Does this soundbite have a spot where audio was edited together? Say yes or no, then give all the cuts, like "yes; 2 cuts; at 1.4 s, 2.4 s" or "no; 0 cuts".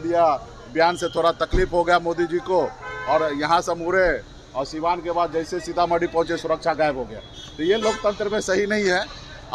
no; 0 cuts